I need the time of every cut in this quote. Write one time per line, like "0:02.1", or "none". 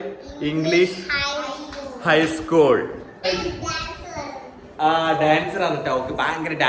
0:03.2